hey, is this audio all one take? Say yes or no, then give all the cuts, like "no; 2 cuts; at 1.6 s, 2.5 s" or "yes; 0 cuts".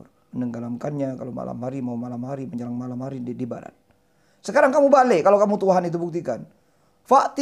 yes; 0 cuts